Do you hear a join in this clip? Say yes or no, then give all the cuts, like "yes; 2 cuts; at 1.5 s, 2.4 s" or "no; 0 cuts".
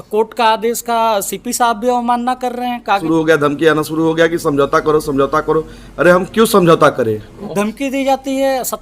yes; 2 cuts; at 3.0 s, 7.3 s